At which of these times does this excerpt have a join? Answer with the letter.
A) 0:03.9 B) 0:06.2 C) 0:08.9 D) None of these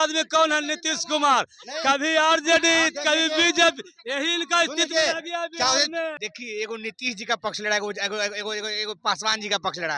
B